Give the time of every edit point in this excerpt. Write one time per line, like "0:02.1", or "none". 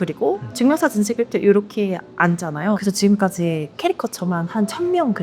0:02.8